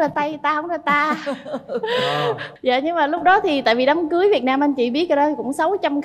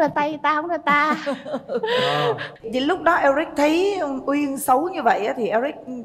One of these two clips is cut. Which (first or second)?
second